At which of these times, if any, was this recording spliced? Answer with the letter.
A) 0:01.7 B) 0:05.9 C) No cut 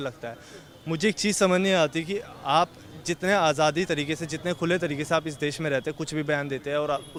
C